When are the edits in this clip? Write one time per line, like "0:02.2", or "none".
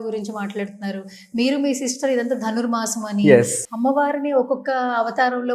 0:03.6